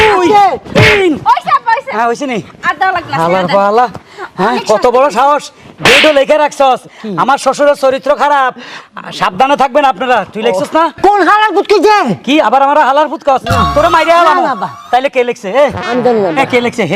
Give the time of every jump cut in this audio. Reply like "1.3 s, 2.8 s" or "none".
none